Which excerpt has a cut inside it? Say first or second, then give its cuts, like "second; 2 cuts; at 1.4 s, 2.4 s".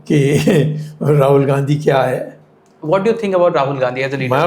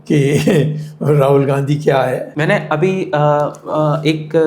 second; 1 cut; at 2.3 s